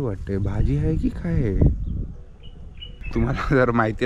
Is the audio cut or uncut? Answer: cut